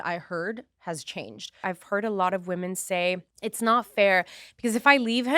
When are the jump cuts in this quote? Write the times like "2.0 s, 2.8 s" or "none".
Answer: 1.6 s, 3.3 s